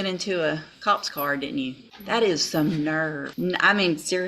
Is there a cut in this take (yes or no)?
yes